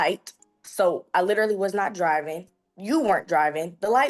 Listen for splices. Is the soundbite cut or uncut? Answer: uncut